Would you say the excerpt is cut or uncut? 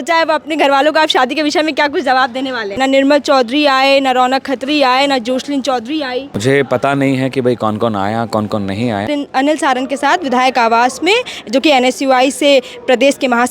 cut